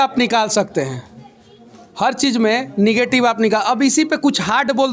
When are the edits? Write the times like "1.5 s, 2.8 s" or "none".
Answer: none